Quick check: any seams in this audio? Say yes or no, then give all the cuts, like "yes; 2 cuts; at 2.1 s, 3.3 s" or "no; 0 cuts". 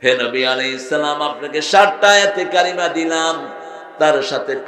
no; 0 cuts